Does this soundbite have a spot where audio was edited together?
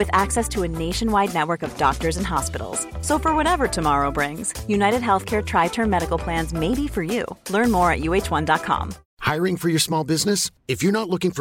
no; 0 cuts

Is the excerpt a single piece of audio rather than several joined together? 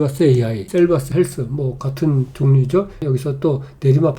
no; 1 cut; at 3.0 s

